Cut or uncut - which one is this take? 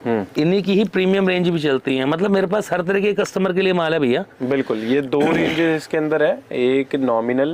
uncut